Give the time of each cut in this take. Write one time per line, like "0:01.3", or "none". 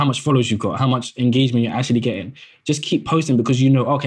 none